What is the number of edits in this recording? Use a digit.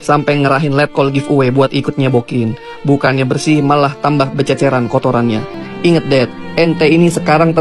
1